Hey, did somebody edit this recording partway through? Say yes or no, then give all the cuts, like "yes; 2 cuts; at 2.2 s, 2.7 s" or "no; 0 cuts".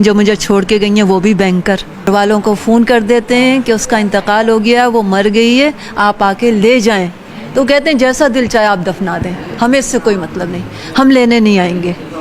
yes; 1 cut; at 2.1 s